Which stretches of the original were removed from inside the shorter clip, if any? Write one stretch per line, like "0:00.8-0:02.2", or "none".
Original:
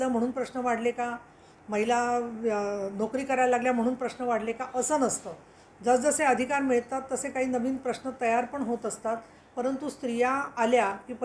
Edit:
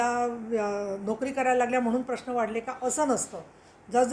none

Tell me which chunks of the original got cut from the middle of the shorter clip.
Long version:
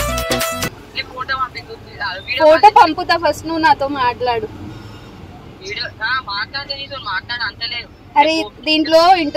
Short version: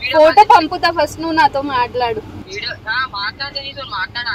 0:04.7-0:05.6

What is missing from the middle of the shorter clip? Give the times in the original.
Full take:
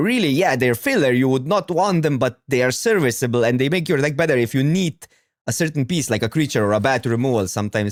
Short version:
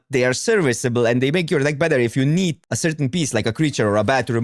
0:05.0-0:05.4

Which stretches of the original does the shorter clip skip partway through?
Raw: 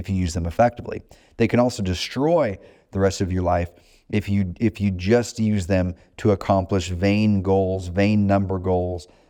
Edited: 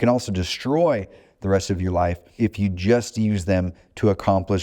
0:03.8-0:04.5

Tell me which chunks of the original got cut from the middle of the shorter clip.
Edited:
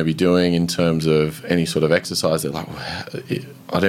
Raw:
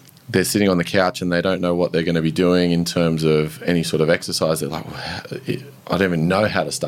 none

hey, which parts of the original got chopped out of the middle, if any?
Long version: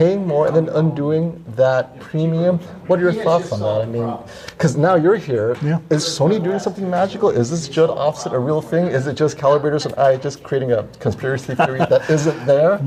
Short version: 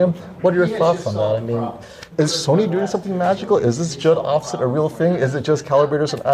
0:04.5-0:05.8

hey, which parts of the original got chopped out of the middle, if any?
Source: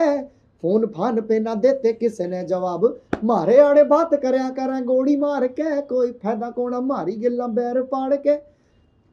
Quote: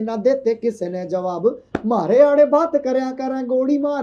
none

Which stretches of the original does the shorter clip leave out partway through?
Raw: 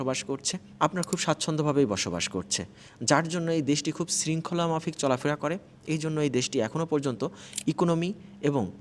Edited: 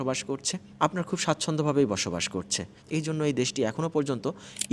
0:02.7-0:05.7

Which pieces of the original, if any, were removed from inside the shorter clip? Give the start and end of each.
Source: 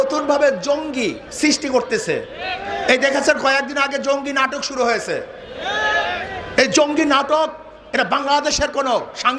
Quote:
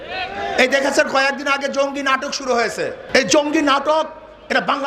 0:05.3-0:06.4

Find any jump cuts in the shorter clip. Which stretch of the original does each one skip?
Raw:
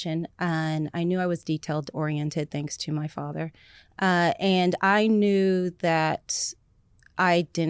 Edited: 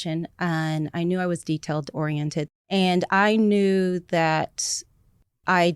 0:02.7-0:04.4

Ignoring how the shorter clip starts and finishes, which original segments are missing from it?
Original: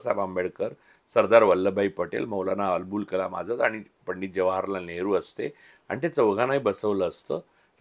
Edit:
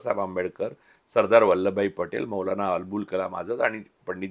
none

